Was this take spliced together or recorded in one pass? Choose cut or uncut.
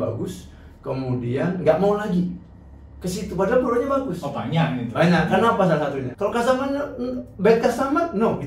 cut